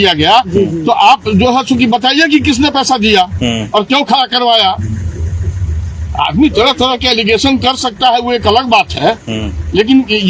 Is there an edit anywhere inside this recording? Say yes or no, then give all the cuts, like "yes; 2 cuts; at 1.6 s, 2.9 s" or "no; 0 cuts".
no; 0 cuts